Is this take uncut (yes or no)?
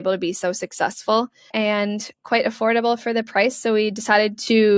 no